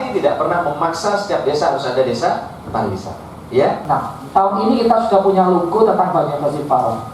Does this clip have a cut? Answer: yes; 1 cut; at 3.8 s

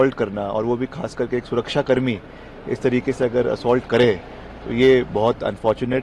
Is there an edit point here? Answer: no; 0 cuts

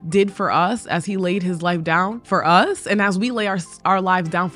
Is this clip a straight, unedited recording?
no; 1 cut; at 2.2 s

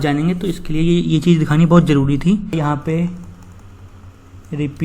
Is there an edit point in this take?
yes; 1 cut; at 2.5 s

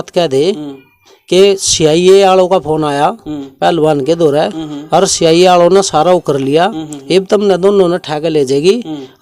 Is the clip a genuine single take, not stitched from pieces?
yes; 0 cuts

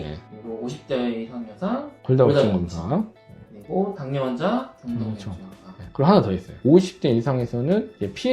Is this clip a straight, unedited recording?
no; 1 cut; at 6.5 s

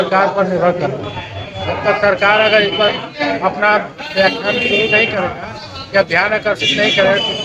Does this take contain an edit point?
no; 0 cuts

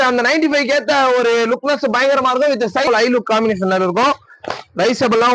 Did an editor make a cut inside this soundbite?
yes; 1 cut; at 2.9 s

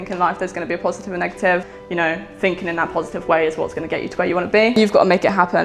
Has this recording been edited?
yes; 2 cuts; at 1.7 s, 4.8 s

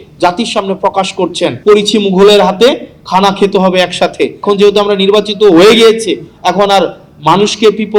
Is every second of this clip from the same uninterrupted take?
no; 2 cuts; at 1.6 s, 4.4 s

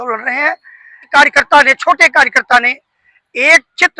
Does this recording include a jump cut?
yes; 1 cut; at 1.1 s

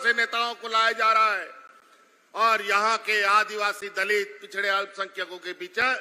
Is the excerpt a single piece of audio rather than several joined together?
yes; 0 cuts

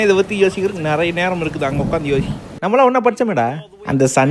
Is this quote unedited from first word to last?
no; 1 cut; at 2.4 s

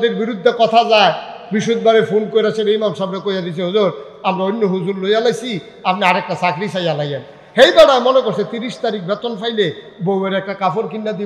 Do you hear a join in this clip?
no; 0 cuts

